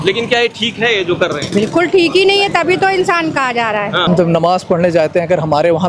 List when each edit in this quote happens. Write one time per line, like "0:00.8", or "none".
0:04.1